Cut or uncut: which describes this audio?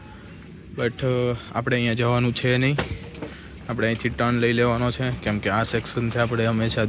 uncut